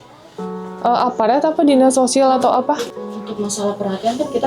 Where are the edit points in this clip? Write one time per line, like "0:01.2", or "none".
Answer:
0:02.9